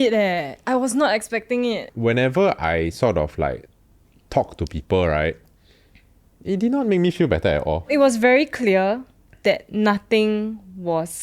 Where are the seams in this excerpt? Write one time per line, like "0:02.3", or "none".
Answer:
0:01.9
0:07.9